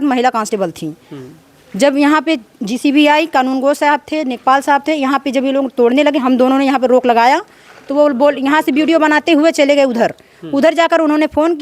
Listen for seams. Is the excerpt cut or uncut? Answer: uncut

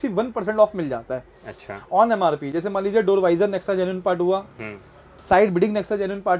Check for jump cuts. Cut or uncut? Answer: uncut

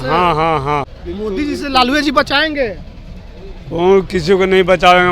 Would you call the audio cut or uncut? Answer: cut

